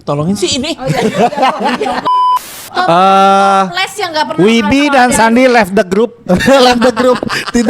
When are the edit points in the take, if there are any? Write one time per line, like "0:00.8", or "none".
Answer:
0:02.5